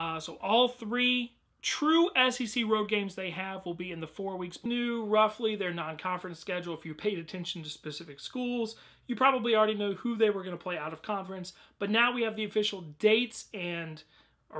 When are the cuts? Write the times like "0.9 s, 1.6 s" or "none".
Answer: none